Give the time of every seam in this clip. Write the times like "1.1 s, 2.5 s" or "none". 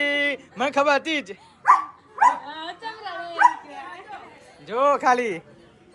none